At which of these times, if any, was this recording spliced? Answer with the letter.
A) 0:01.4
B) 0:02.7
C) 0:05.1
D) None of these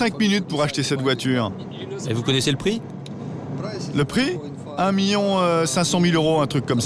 D